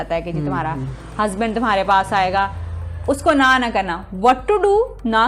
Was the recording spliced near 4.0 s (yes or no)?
no